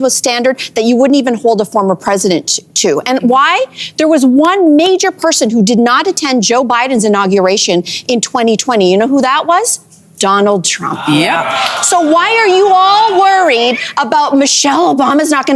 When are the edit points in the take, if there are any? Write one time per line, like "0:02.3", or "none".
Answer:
none